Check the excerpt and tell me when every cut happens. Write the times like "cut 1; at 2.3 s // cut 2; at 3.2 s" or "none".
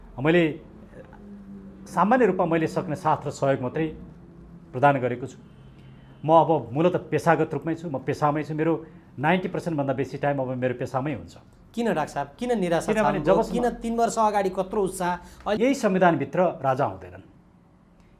cut 1; at 15.6 s